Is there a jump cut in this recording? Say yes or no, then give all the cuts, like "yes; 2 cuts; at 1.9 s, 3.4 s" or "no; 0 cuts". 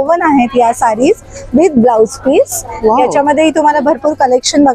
no; 0 cuts